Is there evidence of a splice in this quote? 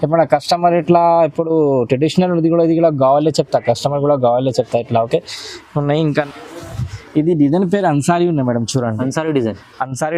yes; 1 cut; at 6.3 s

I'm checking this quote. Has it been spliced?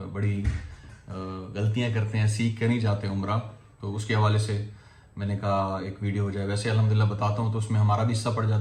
no; 0 cuts

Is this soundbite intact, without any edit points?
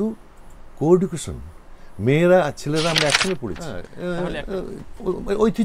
no; 1 cut; at 3.7 s

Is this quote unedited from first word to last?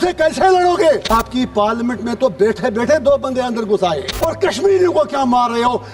no; 2 cuts; at 1.1 s, 4.1 s

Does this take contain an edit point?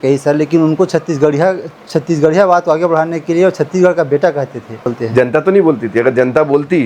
yes; 1 cut; at 4.9 s

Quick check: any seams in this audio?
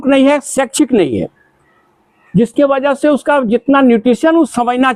no; 0 cuts

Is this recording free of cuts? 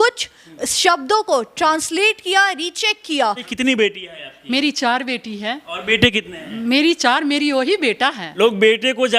no; 2 cuts; at 3.5 s, 8.2 s

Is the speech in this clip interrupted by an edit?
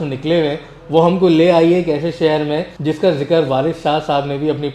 yes; 1 cut; at 2.7 s

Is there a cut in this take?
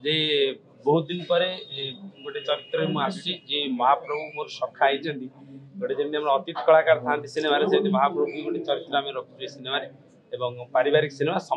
no; 0 cuts

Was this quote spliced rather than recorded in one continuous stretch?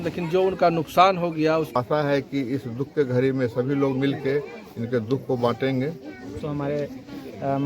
yes; 2 cuts; at 1.8 s, 6.4 s

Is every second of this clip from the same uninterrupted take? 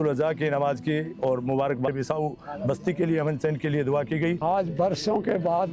no; 2 cuts; at 1.9 s, 4.4 s

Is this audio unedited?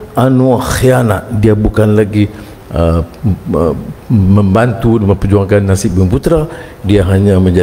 yes; 0 cuts

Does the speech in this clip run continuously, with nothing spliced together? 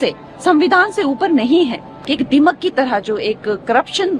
no; 1 cut; at 2.0 s

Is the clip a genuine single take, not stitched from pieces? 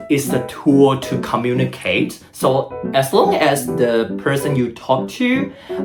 yes; 0 cuts

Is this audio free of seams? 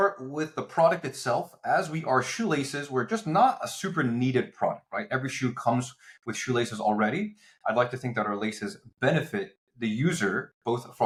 yes; 0 cuts

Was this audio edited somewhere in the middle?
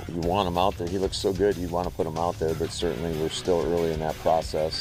no; 0 cuts

